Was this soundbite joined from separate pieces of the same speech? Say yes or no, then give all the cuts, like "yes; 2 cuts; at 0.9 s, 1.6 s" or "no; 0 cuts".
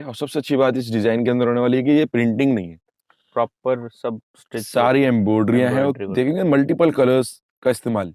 no; 0 cuts